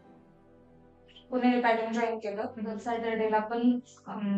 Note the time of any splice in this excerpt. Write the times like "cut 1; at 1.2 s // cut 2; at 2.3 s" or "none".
cut 1; at 2.8 s